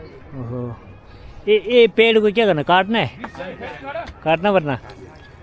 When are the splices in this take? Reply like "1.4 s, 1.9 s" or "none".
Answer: none